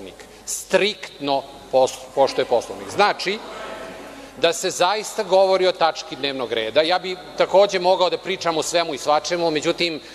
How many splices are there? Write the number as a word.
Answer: one